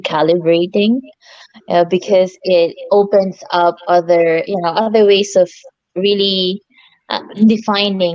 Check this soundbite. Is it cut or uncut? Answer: uncut